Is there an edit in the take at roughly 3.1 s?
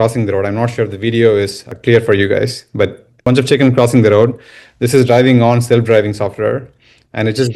yes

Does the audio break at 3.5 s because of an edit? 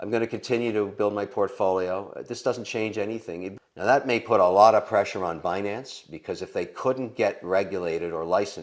yes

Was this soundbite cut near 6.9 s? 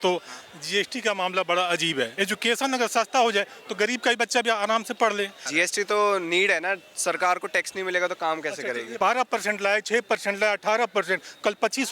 no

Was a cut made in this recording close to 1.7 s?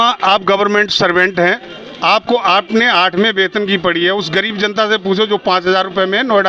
no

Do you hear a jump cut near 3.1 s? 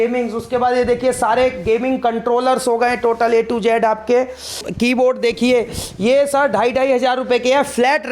no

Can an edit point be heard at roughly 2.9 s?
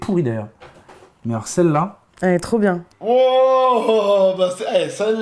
yes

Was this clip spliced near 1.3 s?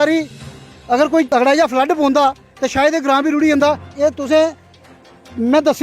yes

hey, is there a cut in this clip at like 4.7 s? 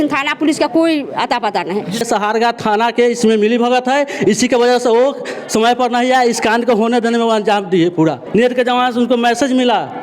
no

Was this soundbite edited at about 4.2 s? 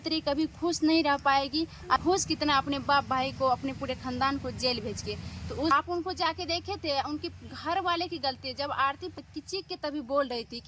no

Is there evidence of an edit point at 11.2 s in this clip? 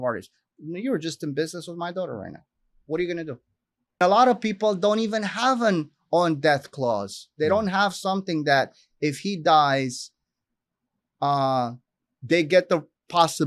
no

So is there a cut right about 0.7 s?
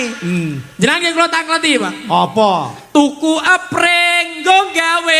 no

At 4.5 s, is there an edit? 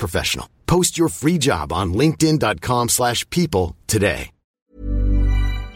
yes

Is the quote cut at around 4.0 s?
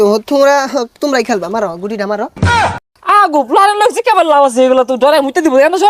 no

